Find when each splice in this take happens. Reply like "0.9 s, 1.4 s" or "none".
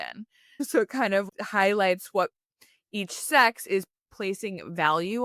1.3 s

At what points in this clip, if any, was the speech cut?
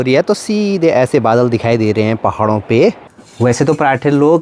3.0 s

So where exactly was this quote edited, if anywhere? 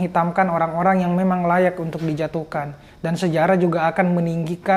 none

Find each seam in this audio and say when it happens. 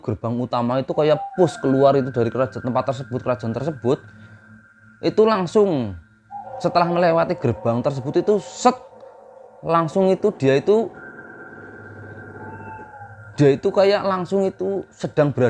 none

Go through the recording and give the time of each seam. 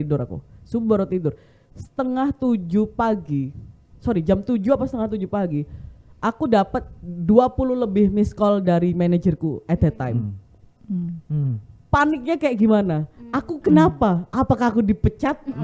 none

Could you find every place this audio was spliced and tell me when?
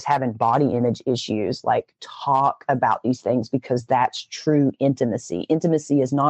none

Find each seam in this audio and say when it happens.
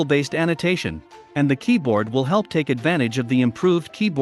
none

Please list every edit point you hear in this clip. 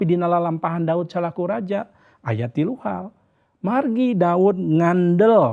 none

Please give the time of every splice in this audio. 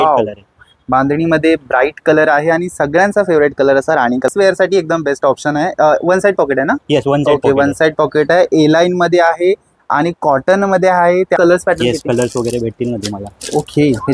4.3 s, 11.4 s

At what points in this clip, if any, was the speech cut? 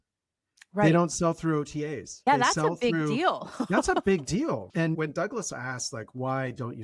none

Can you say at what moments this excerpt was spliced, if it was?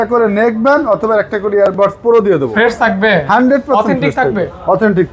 2.5 s

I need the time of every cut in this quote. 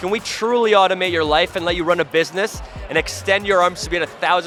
none

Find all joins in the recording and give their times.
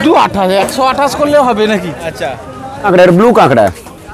2.8 s

